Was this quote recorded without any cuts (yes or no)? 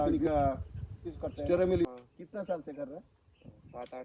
no